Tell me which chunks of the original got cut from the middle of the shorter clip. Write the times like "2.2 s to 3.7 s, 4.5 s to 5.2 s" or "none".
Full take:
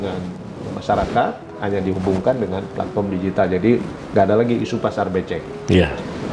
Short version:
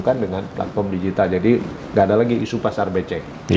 none